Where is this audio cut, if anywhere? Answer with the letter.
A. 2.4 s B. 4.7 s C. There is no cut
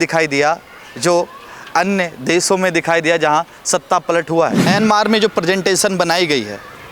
B